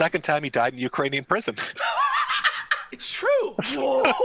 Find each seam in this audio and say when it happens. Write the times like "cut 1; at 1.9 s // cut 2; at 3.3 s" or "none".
none